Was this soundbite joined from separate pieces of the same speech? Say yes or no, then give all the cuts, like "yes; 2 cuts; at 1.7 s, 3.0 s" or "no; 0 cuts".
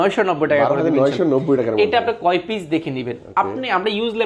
no; 0 cuts